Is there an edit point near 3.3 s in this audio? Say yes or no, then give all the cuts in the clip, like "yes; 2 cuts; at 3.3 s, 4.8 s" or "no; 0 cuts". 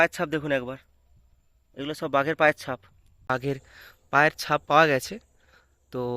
yes; 1 cut; at 3.3 s